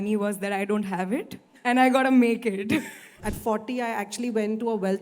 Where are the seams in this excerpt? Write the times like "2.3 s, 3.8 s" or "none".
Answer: 1.4 s, 3.1 s

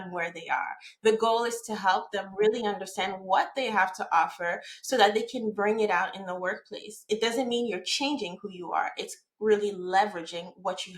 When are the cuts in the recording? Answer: none

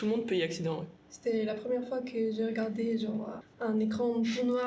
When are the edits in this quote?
1.1 s, 3.4 s

